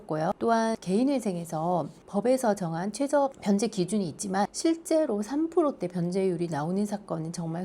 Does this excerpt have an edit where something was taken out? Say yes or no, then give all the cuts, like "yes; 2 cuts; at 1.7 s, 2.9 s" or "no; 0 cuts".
yes; 2 cuts; at 3.4 s, 4.5 s